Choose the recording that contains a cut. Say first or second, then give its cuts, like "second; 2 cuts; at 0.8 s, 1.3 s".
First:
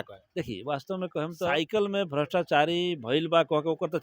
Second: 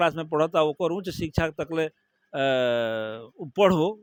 first; 1 cut; at 1.5 s